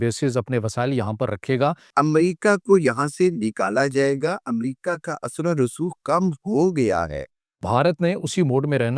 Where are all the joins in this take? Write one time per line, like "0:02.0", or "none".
0:01.8
0:07.6

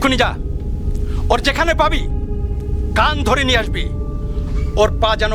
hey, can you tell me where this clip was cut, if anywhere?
none

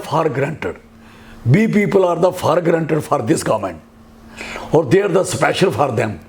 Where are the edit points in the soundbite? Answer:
none

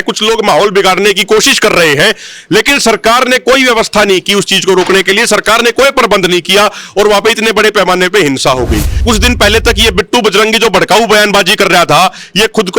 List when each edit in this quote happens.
0:09.0

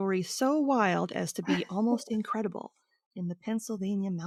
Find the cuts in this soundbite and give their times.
none

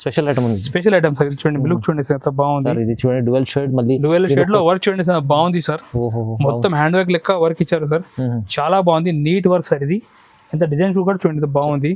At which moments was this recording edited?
none

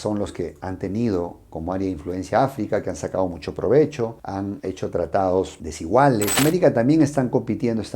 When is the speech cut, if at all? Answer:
0:06.4

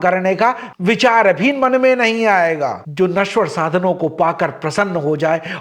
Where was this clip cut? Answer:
0:02.9

